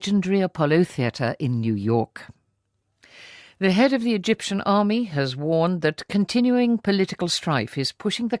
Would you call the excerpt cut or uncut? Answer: cut